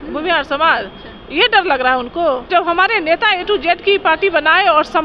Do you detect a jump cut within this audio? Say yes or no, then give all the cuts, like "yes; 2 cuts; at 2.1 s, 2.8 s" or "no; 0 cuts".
yes; 1 cut; at 2.5 s